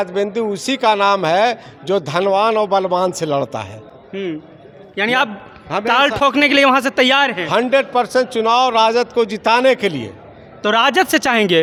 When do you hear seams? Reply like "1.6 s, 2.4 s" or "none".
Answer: none